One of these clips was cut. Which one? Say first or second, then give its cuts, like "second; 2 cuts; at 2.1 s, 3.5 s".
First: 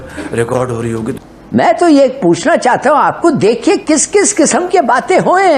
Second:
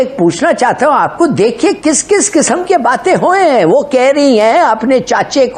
first; 1 cut; at 1.1 s